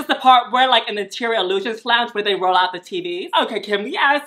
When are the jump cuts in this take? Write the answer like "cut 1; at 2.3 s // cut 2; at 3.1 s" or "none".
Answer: cut 1; at 3.2 s